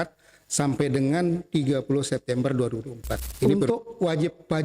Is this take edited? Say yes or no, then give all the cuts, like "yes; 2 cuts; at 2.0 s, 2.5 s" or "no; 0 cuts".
yes; 1 cut; at 3.4 s